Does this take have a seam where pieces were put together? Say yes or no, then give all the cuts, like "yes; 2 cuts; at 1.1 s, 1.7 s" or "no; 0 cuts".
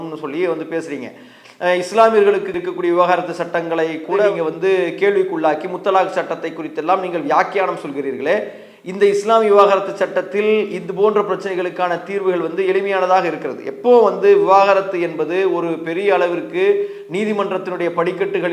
no; 0 cuts